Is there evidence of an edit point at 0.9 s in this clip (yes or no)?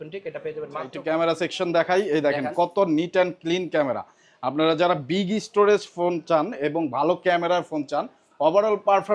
yes